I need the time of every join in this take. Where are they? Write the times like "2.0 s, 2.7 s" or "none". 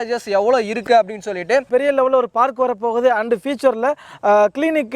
1.7 s